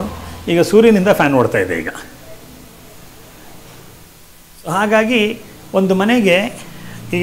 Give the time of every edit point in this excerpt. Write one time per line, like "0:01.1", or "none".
none